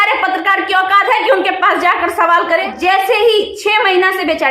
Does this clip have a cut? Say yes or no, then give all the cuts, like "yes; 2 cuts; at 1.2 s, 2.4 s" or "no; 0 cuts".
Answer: yes; 1 cut; at 2.7 s